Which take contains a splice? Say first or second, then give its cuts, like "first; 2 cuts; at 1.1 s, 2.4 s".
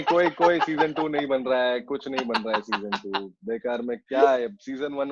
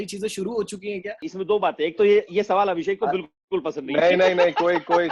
second; 1 cut; at 1.2 s